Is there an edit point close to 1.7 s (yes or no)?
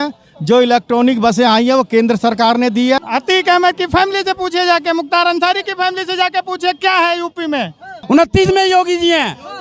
no